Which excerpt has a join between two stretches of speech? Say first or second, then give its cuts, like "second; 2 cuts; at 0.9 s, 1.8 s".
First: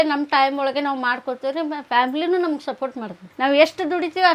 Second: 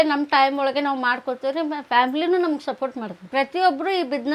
first; 1 cut; at 3.2 s